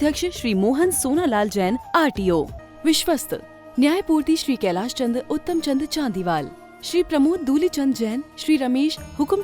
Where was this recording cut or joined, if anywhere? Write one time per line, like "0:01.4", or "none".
0:02.6